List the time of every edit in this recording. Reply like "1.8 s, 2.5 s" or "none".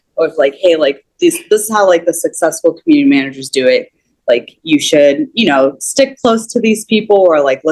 none